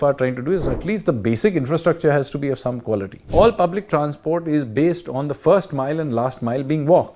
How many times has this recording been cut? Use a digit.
1